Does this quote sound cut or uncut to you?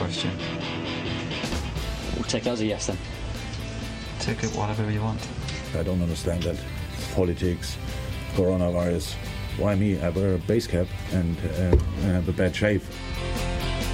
uncut